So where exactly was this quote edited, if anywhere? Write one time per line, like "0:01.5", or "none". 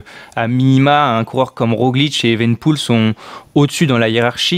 none

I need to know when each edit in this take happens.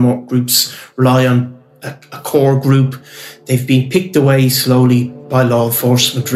0:05.2

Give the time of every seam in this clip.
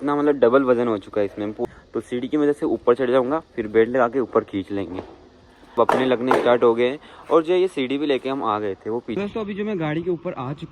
0:01.6
0:05.7
0:09.2

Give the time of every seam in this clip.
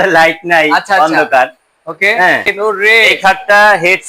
0:02.5

